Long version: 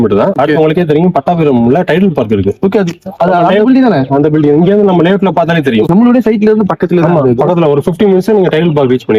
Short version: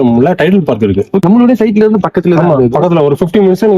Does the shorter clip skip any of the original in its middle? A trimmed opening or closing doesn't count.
yes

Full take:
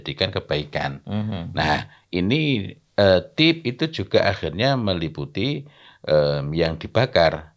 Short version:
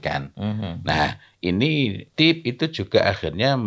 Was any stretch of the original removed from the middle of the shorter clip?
yes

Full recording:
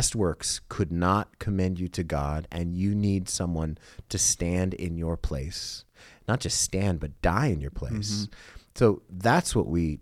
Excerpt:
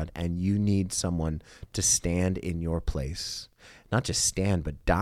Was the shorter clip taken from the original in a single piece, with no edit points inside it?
yes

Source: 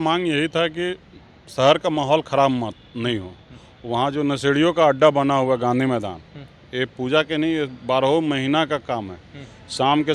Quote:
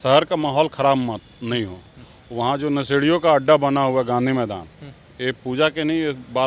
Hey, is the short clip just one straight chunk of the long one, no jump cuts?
yes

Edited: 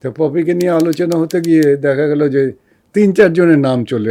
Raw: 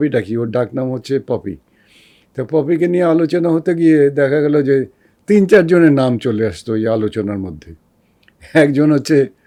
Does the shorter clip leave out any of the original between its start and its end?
no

